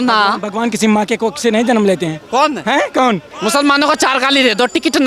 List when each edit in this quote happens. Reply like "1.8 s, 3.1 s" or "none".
3.3 s

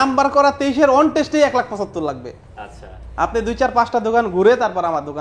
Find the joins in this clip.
none

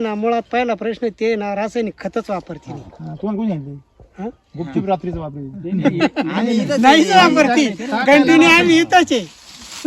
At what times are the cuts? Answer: none

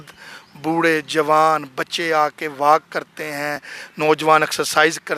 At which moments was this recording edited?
none

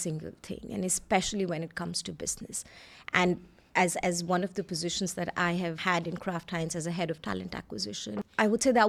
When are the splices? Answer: none

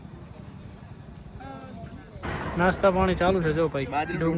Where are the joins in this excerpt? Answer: 2.6 s

